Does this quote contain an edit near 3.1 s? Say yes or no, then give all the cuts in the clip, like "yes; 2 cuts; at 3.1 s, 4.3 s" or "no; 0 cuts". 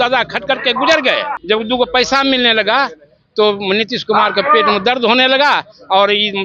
no; 1 cut; at 1.4 s